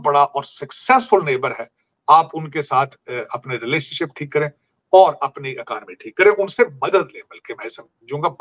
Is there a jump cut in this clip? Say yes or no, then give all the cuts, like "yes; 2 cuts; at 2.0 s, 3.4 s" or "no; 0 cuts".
no; 0 cuts